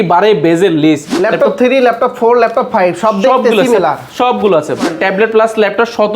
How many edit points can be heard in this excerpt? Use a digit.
2